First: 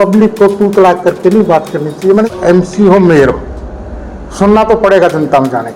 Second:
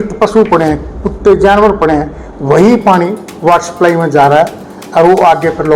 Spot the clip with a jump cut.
first; 1 cut; at 2.3 s

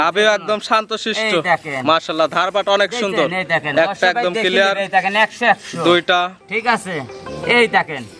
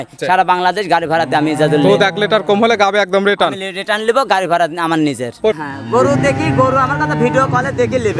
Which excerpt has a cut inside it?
second; 1 cut; at 5.6 s

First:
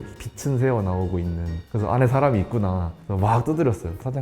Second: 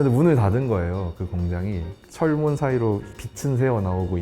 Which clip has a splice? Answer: second; 1 cut; at 2.0 s

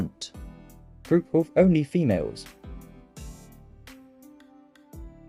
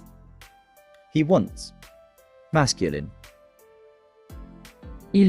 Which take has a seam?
second; 1 cut; at 1.1 s

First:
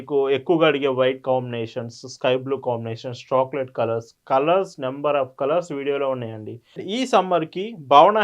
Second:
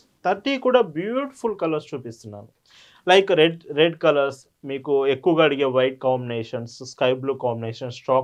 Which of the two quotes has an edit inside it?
first; 1 cut; at 6.8 s

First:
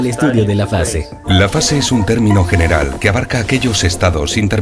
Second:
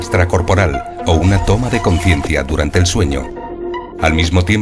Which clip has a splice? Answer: second; 1 cut; at 1.8 s

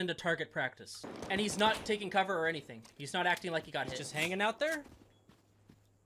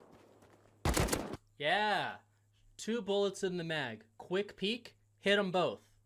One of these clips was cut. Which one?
first; 1 cut; at 1.1 s

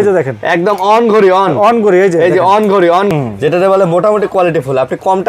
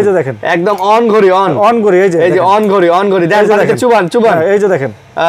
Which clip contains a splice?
first; 1 cut; at 3.1 s

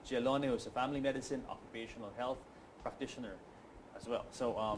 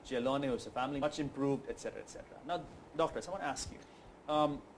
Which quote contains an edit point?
first; 1 cut; at 1.0 s

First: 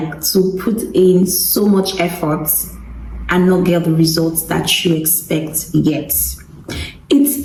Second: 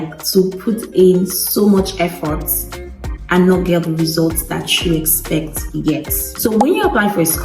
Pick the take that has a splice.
second; 1 cut; at 6.2 s

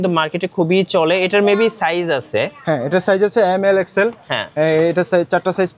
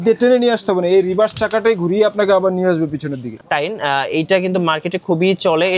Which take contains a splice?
second; 1 cut; at 3.3 s

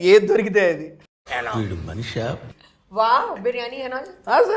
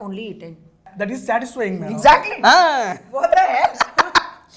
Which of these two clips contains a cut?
second; 1 cut; at 0.9 s

